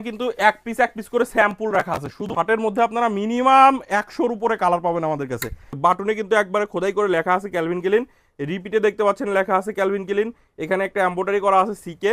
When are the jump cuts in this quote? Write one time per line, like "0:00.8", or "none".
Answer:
0:02.3
0:05.6

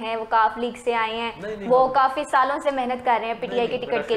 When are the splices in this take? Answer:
none

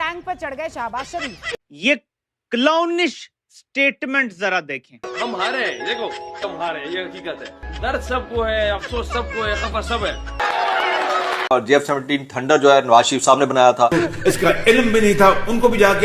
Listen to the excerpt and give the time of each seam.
0:01.6
0:05.1
0:10.4
0:13.9

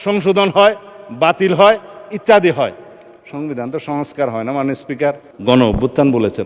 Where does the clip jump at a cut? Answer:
0:05.3

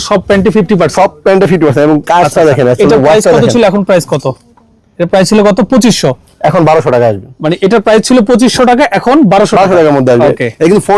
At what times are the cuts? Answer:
none

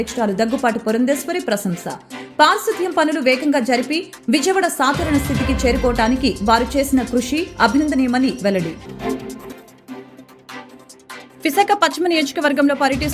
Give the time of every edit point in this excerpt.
0:08.9
0:10.7

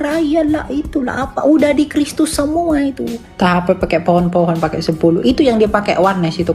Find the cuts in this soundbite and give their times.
0:03.2

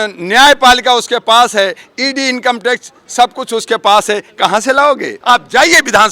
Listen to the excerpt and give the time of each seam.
0:05.1

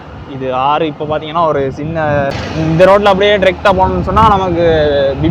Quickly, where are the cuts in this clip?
0:02.4

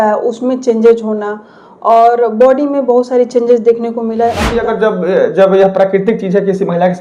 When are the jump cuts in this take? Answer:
0:04.5

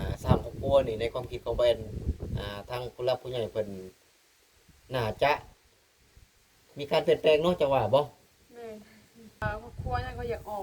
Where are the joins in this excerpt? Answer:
0:09.4

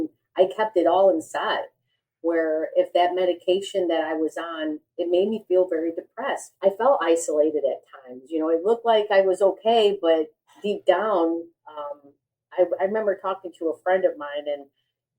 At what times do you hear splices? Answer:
0:04.8
0:06.5

